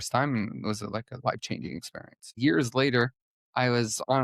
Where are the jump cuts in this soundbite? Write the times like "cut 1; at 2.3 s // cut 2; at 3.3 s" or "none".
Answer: cut 1; at 2.3 s